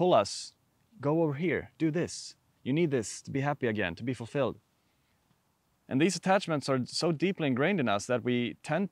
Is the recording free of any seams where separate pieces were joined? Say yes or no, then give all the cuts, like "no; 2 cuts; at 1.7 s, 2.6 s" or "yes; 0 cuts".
yes; 0 cuts